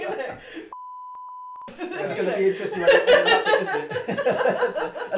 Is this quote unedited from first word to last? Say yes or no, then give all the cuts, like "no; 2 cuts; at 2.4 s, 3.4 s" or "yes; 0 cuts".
no; 1 cut; at 1.2 s